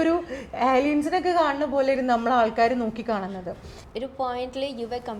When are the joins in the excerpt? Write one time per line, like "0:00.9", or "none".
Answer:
0:03.8